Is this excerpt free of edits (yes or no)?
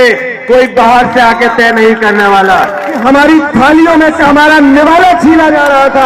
no